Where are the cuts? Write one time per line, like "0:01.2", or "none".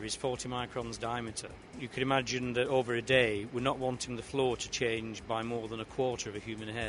none